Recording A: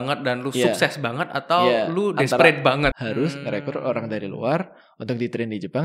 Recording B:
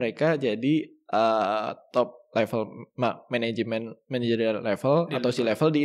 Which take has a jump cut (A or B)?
A